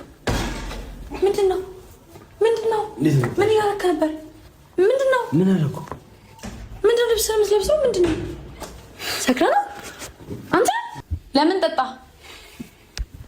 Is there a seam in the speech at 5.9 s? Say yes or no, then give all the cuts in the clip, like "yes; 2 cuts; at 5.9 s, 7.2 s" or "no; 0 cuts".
no; 1 cut; at 10.9 s